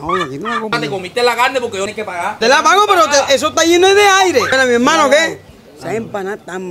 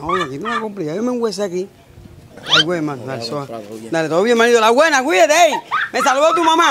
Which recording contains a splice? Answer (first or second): first